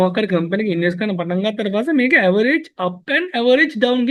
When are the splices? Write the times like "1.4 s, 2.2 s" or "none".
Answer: none